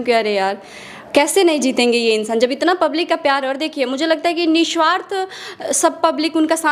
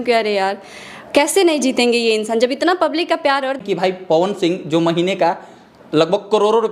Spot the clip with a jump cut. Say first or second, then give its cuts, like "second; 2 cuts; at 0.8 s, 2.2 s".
second; 1 cut; at 3.6 s